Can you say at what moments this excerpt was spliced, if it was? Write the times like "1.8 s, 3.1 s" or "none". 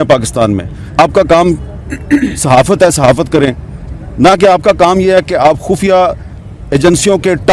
1.0 s

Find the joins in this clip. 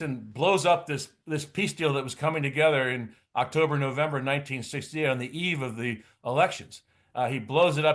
none

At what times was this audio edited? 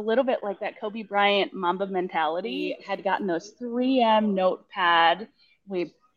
2.8 s

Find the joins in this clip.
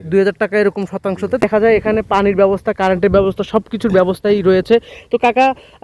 1.4 s

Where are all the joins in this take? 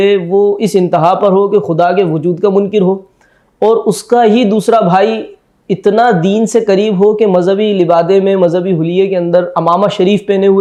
none

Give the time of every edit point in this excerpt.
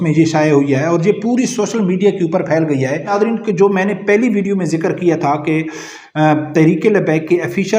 3.1 s

